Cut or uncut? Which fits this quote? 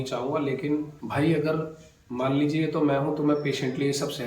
cut